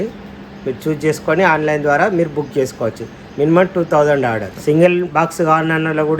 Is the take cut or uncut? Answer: cut